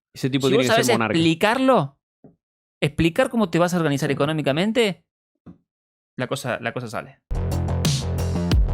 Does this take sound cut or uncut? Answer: cut